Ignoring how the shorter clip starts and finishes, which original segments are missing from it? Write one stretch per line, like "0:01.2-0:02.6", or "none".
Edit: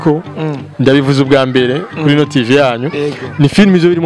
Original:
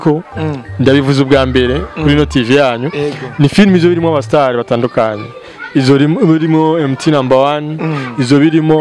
none